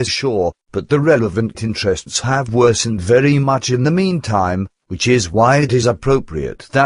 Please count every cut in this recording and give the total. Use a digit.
1